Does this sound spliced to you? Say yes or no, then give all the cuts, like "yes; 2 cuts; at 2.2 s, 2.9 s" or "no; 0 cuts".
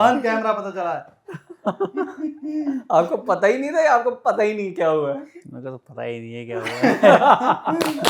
no; 0 cuts